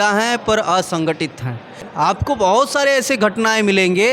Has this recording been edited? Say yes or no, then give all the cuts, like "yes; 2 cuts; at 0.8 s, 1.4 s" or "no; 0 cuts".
yes; 1 cut; at 1.9 s